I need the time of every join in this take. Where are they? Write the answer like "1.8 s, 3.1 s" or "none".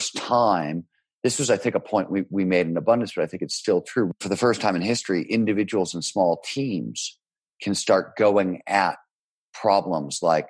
4.2 s